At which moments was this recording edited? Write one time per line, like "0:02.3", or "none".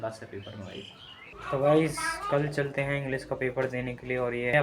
none